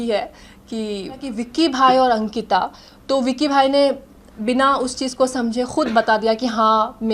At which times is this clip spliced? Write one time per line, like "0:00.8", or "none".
0:01.3